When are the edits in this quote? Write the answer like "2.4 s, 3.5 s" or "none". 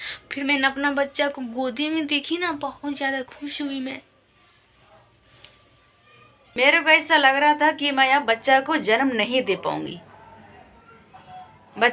6.5 s